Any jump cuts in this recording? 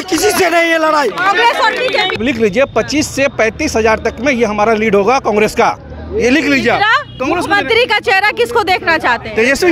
yes; 2 cuts; at 2.2 s, 7.1 s

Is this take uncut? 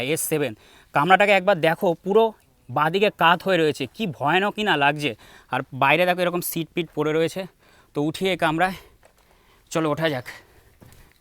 yes; 0 cuts

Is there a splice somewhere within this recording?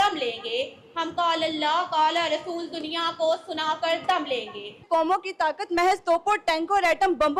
yes; 1 cut; at 4.8 s

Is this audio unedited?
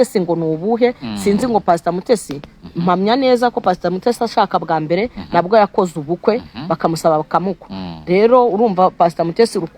yes; 0 cuts

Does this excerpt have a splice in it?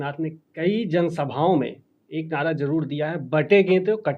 no; 0 cuts

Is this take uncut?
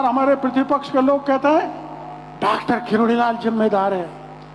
yes; 0 cuts

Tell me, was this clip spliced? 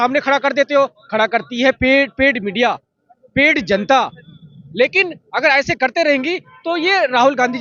no; 0 cuts

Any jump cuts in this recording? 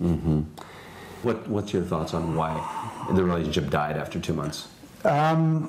yes; 1 cut; at 1.2 s

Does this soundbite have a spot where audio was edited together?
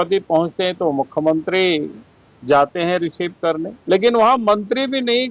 yes; 1 cut; at 3.7 s

